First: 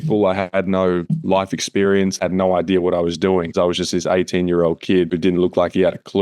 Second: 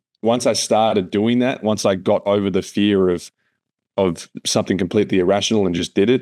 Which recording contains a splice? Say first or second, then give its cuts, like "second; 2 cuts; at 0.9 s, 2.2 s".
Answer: first; 3 cuts; at 2.1 s, 3.5 s, 5.1 s